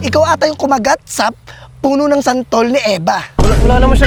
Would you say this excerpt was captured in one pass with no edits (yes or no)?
yes